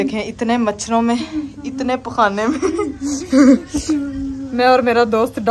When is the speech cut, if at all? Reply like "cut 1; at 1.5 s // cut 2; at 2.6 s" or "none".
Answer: none